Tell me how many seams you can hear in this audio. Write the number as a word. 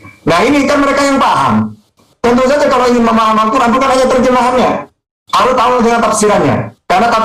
zero